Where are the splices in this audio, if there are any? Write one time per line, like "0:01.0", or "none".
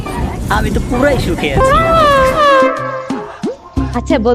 0:02.4